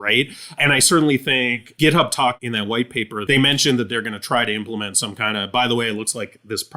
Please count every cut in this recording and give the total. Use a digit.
2